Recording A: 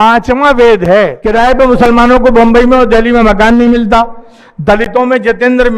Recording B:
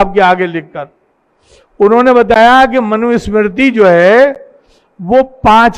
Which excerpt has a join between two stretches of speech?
A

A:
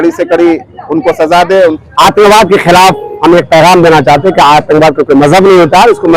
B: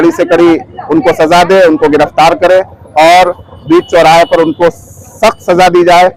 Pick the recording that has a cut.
A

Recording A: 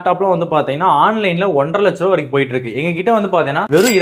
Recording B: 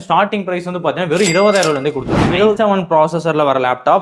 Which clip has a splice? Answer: B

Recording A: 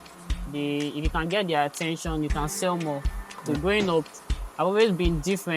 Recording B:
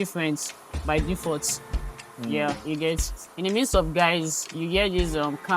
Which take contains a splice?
A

